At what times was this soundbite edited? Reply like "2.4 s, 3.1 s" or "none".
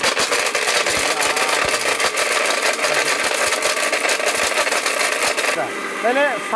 5.5 s